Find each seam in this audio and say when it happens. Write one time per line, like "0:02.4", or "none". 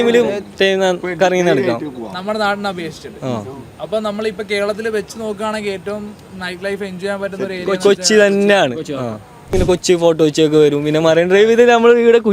0:09.5